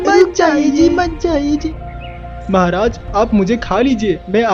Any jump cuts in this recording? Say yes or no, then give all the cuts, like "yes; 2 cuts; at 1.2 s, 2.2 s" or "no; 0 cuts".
yes; 1 cut; at 1.6 s